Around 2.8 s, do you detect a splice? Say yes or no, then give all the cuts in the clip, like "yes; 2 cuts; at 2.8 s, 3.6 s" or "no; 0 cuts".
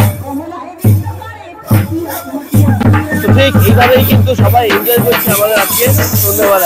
yes; 1 cut; at 2.8 s